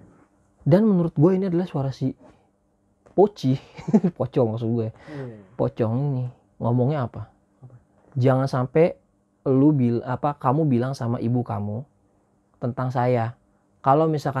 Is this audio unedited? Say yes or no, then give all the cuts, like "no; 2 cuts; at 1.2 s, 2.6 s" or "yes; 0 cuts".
yes; 0 cuts